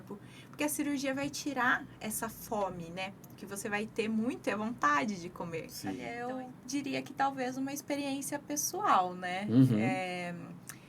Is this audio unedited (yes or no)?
no